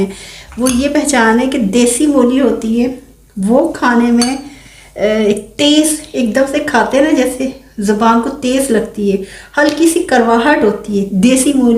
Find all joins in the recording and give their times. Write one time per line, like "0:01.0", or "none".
none